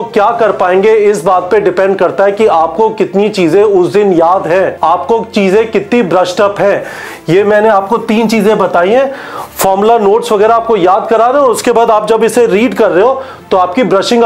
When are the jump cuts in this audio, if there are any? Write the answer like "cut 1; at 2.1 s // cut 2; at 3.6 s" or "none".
cut 1; at 4.7 s